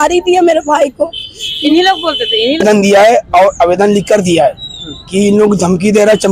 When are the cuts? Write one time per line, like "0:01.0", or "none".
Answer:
0:02.6